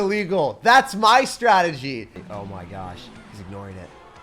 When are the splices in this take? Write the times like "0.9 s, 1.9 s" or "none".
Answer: 2.2 s

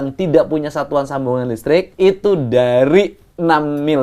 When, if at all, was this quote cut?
1.9 s

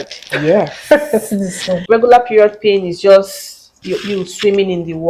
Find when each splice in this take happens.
1.7 s

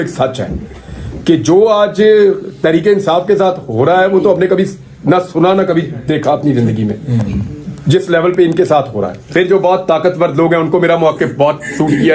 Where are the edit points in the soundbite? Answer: 9.2 s

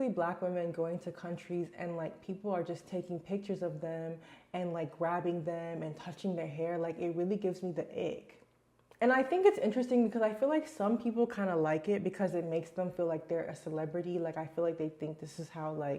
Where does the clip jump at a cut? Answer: 8.9 s

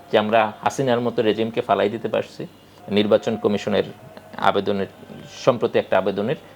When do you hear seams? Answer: none

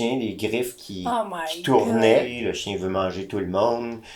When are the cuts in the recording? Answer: 2.4 s

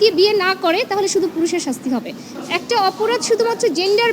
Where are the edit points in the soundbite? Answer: 2.3 s

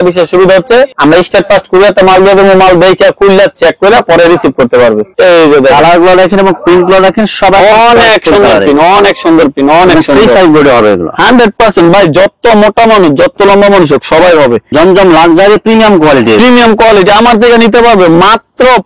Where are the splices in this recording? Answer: 5.1 s, 14.7 s

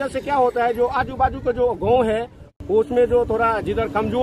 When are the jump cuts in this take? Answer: 2.5 s

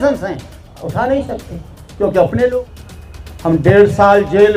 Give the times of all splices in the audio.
2.6 s

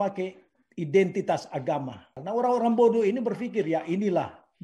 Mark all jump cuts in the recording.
2.1 s

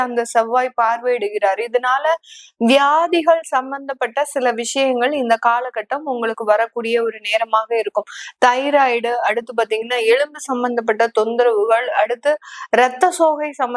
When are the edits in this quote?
none

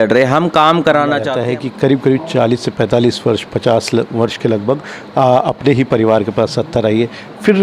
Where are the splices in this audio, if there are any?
1.3 s

